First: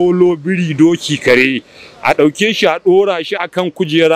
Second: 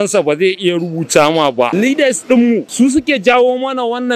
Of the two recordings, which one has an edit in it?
second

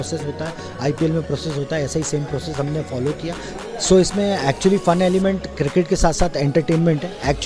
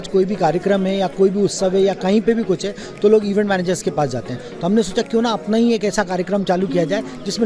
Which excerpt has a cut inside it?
first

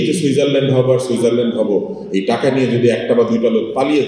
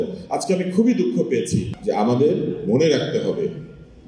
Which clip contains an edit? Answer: second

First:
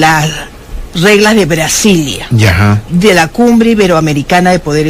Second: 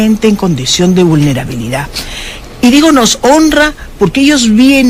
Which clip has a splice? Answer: first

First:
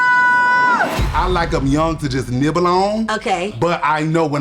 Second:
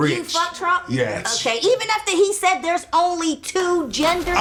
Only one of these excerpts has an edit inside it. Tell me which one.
first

